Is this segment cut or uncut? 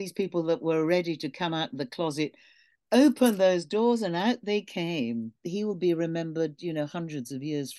cut